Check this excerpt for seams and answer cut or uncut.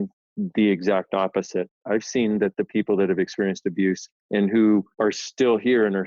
cut